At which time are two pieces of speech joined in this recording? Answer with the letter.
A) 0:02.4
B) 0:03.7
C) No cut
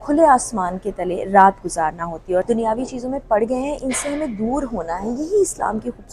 A